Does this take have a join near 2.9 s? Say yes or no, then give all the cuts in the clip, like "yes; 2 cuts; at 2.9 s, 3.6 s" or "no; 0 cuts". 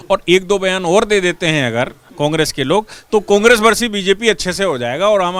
no; 0 cuts